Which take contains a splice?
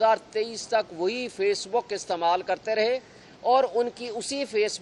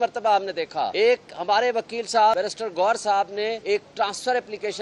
second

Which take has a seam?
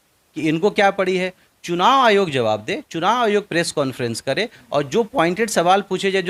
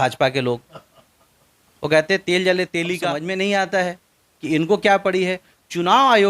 second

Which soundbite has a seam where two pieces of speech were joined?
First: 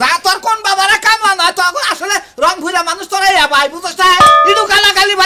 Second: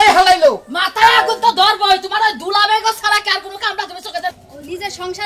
second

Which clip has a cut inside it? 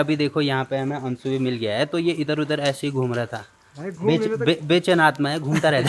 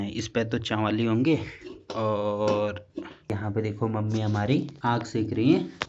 second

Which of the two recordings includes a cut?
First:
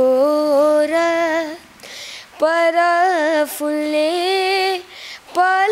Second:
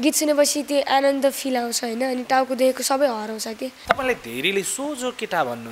second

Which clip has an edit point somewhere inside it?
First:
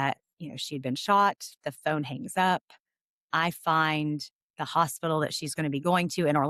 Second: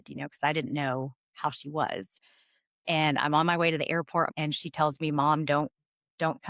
second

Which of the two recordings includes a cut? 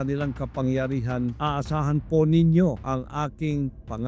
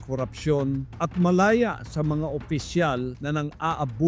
first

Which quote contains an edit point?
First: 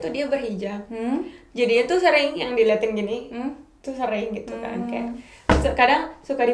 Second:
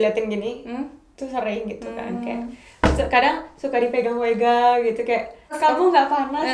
second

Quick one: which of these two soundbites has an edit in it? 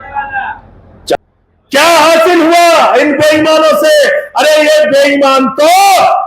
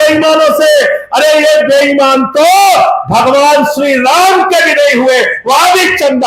first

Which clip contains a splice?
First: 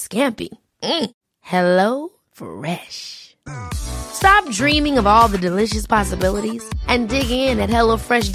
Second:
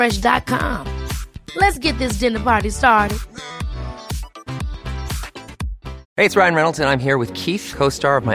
second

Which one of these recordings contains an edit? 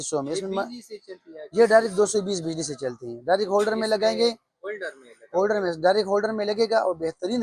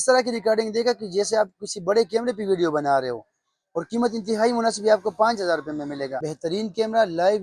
second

